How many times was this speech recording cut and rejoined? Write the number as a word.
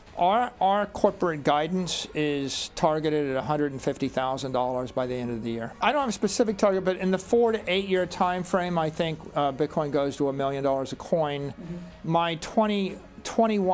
one